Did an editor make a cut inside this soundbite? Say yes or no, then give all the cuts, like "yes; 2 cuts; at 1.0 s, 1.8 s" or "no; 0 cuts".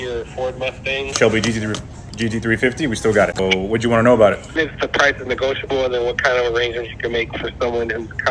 yes; 3 cuts; at 1.1 s, 3.4 s, 4.6 s